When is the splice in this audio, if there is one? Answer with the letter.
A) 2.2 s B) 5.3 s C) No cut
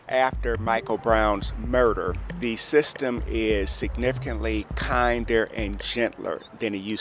A